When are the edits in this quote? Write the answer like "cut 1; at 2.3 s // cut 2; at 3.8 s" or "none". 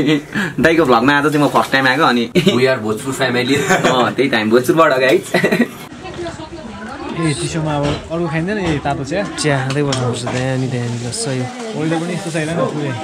cut 1; at 2.3 s // cut 2; at 5.9 s